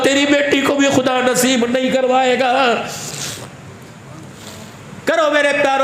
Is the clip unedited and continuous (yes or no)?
no